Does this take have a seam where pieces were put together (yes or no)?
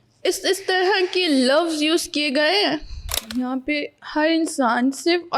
yes